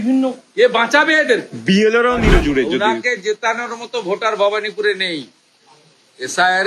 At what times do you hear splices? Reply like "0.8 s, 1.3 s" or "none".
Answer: 2.3 s